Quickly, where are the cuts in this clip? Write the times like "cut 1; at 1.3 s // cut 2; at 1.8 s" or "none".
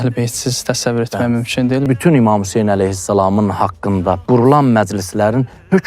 cut 1; at 1.9 s // cut 2; at 4.2 s